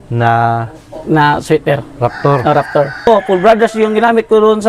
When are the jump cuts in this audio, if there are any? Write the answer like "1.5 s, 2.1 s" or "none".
3.1 s